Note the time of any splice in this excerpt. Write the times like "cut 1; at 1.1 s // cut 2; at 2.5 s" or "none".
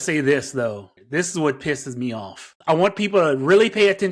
cut 1; at 0.9 s // cut 2; at 2.6 s